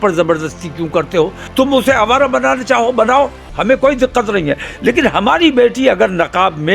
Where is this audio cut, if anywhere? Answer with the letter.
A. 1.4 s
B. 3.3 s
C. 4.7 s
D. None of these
A